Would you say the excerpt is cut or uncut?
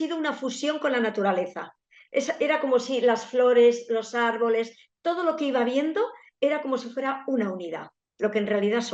uncut